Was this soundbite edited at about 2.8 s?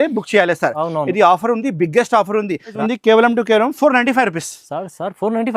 yes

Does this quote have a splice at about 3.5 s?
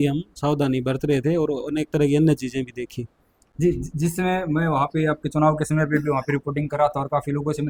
no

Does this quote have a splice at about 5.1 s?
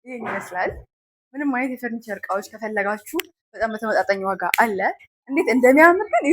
yes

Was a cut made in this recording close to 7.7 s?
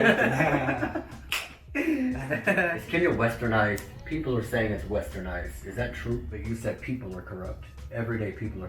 no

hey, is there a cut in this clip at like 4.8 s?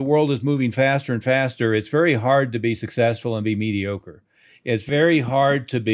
yes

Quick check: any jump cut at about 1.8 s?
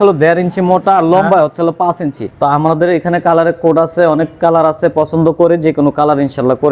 yes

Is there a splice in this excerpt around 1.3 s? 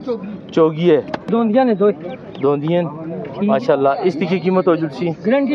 yes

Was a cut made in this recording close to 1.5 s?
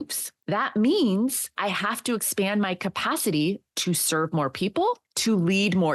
yes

